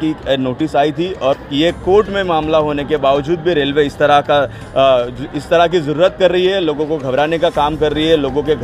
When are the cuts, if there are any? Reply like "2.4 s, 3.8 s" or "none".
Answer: 1.4 s